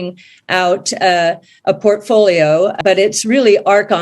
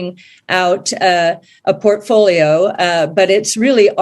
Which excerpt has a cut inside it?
first; 1 cut; at 2.8 s

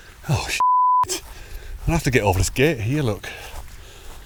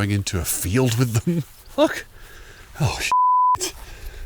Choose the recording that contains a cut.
second; 1 cut; at 1.6 s

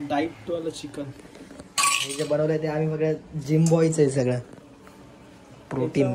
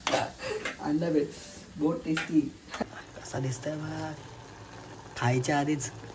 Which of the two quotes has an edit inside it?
second; 2 cuts; at 0.8 s, 2.7 s

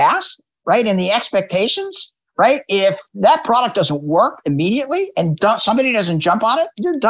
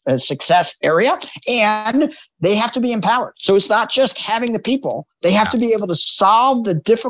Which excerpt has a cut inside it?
first; 1 cut; at 3.1 s

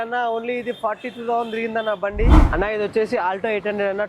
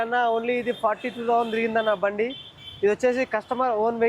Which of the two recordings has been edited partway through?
first; 1 cut; at 2.4 s

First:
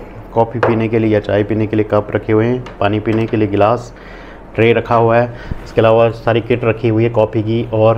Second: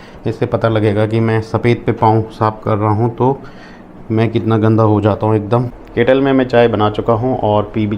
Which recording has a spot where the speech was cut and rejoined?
second; 1 cut; at 5.8 s

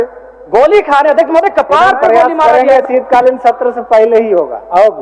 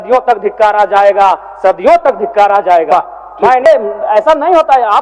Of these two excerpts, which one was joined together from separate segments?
second; 1 cut; at 3.7 s

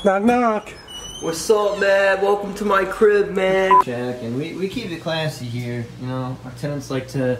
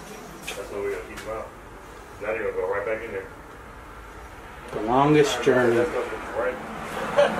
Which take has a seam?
first; 1 cut; at 3.8 s

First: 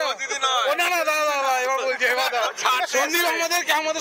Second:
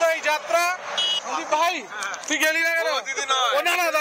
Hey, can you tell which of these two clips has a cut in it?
second; 1 cut; at 1.2 s

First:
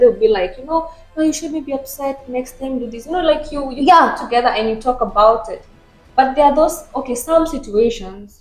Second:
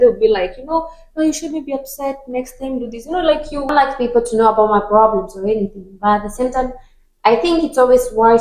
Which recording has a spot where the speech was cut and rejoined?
second; 1 cut; at 3.7 s

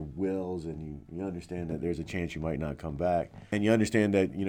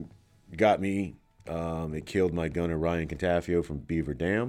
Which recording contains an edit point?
first; 1 cut; at 3.4 s

